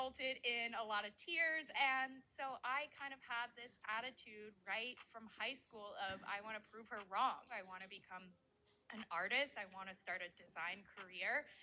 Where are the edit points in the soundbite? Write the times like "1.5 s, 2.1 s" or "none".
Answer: 1.7 s, 7.5 s